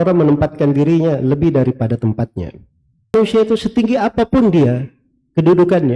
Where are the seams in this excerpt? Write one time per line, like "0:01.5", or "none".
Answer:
0:03.1